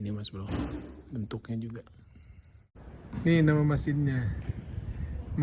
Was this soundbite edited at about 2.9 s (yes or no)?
yes